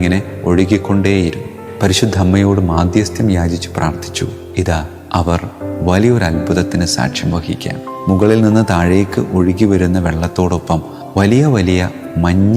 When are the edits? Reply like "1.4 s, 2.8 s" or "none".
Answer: 1.6 s